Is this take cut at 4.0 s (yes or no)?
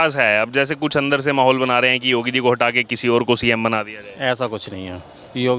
no